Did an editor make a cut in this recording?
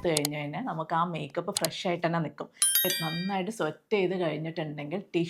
yes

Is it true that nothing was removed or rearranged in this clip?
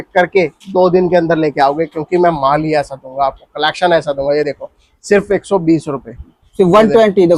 yes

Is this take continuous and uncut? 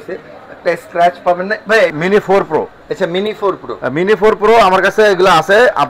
no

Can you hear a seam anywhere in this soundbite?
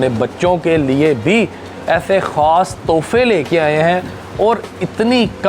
no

